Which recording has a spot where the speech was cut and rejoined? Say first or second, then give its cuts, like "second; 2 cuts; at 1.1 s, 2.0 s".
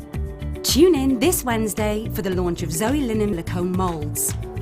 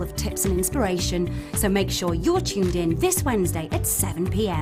first; 1 cut; at 3.3 s